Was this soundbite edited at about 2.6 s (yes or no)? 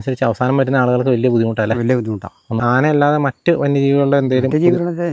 yes